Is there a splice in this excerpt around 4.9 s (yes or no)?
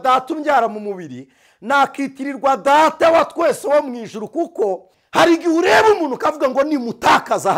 yes